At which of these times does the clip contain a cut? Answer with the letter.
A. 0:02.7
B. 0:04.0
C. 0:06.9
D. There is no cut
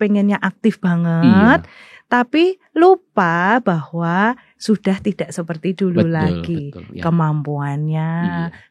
D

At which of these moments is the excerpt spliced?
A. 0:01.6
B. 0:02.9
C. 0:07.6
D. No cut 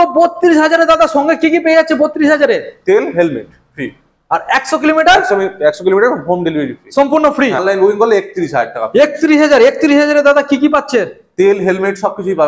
C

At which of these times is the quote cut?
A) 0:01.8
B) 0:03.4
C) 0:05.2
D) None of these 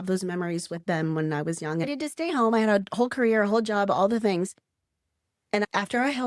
A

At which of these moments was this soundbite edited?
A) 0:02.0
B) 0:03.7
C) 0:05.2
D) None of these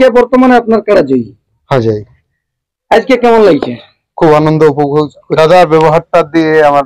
C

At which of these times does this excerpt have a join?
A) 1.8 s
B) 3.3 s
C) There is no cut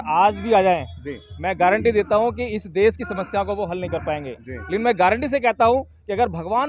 C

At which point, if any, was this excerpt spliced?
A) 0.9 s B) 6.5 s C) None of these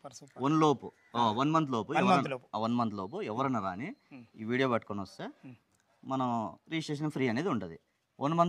C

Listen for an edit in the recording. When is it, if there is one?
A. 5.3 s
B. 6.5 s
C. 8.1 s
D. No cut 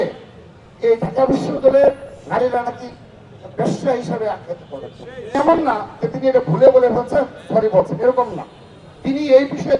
A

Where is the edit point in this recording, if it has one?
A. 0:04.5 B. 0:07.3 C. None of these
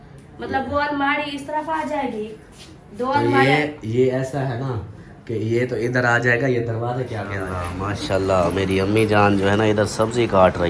B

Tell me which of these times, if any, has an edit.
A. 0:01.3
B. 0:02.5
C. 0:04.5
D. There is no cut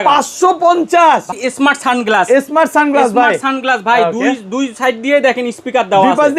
A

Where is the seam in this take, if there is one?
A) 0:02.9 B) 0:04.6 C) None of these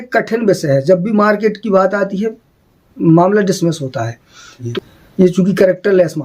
B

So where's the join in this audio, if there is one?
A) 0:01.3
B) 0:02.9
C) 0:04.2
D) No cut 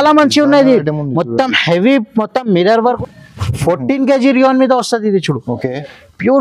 B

